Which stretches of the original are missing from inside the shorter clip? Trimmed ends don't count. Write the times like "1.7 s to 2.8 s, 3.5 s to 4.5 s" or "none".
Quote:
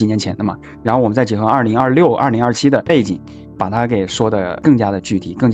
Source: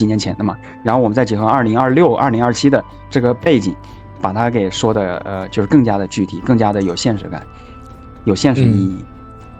3.1 s to 3.7 s, 5.2 s to 5.7 s